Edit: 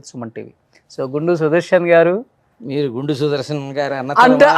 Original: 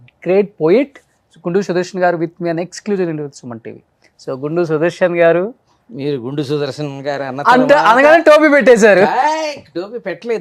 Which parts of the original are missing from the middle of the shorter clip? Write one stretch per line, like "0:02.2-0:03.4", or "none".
none

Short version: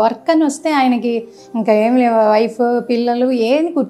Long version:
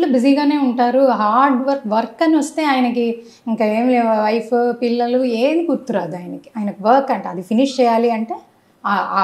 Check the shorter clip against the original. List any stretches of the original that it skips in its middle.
none

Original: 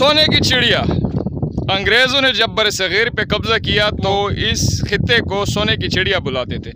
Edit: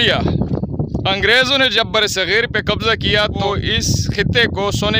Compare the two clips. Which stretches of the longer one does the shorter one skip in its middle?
0:04.1-0:04.2

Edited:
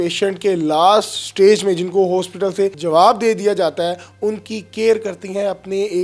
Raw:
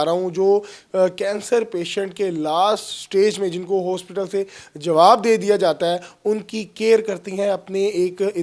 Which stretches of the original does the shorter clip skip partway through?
0:04.5-0:04.8

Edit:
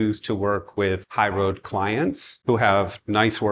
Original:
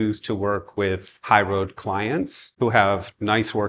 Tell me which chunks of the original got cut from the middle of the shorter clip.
0:01.1-0:01.2

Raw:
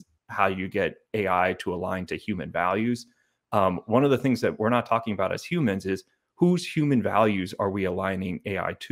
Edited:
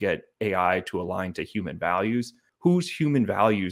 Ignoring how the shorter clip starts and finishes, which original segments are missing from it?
0:03.2-0:06.2

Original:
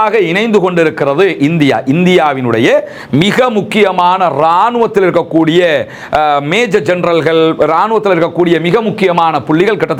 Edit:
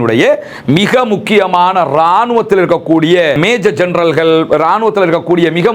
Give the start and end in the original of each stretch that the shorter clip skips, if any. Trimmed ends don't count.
0:05.8-0:06.5

